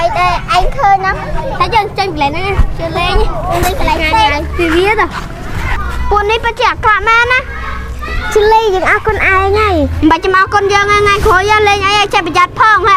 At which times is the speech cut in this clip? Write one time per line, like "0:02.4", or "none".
none